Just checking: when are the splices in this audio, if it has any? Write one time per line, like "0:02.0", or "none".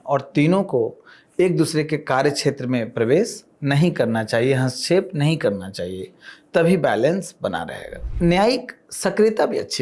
0:08.1